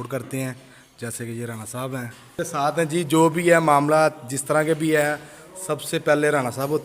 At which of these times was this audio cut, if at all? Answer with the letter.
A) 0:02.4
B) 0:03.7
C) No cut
A